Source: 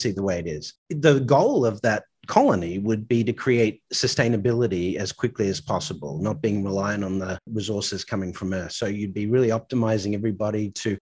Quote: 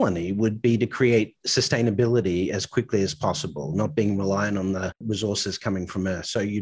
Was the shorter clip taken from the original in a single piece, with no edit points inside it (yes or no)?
yes